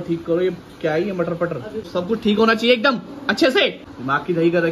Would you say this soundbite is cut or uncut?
cut